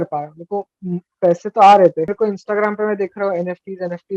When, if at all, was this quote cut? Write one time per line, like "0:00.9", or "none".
0:02.1